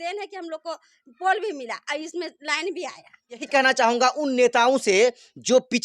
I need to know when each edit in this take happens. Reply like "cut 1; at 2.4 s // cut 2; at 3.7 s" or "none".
cut 1; at 3.5 s